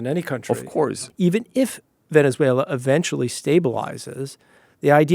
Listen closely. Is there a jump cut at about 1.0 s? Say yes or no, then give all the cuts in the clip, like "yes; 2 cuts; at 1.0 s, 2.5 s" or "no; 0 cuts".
yes; 1 cut; at 1.0 s